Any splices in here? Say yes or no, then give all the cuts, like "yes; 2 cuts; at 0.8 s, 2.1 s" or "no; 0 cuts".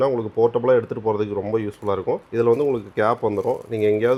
no; 0 cuts